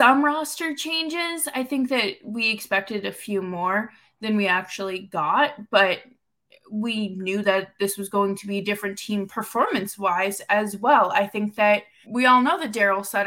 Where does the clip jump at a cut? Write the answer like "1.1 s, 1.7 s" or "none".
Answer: 12.0 s